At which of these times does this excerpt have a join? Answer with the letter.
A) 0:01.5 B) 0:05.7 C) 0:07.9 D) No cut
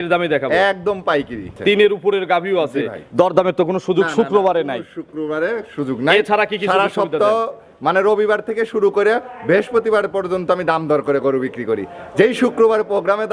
A